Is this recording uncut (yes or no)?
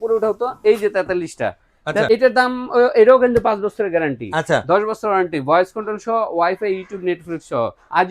no